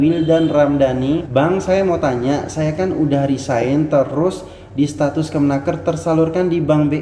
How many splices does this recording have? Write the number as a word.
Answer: one